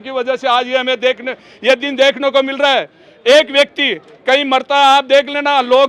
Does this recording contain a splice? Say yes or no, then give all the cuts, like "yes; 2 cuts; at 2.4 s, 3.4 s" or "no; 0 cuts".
no; 0 cuts